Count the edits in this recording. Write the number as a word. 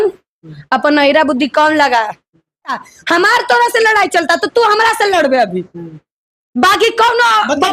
one